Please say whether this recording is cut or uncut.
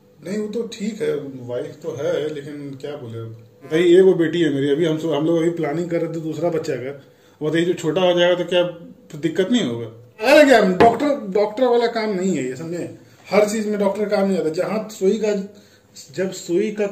cut